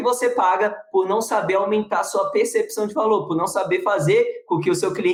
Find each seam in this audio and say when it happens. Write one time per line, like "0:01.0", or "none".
none